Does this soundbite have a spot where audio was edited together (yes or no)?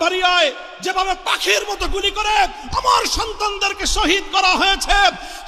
no